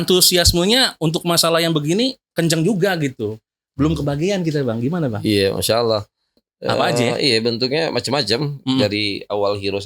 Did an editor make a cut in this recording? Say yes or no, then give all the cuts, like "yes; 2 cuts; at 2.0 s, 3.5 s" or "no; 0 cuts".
yes; 1 cut; at 6.5 s